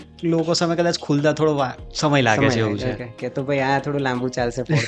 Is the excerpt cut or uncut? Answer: cut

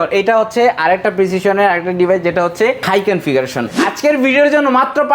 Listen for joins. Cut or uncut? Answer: cut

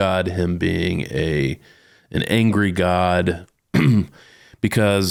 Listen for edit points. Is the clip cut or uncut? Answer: uncut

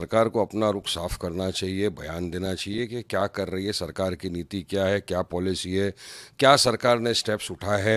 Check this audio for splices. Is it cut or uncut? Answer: uncut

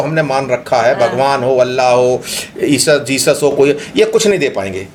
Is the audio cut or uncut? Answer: uncut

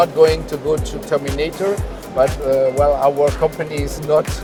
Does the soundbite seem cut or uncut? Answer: uncut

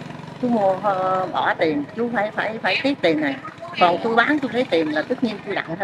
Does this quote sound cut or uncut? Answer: uncut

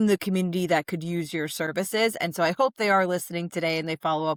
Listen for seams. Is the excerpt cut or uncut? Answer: uncut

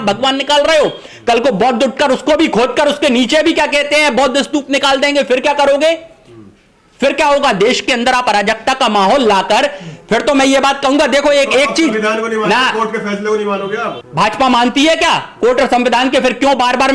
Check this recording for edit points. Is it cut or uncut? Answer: uncut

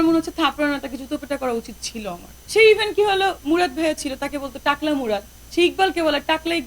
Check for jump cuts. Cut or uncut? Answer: cut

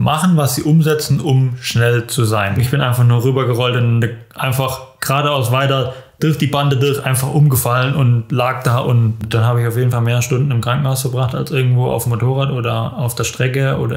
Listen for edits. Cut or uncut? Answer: cut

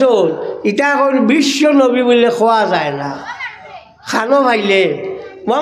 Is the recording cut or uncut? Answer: uncut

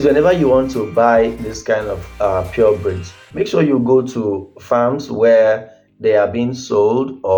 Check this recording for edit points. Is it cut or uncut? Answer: uncut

